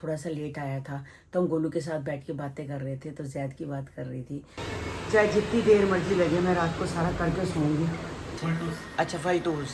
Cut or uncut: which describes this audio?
cut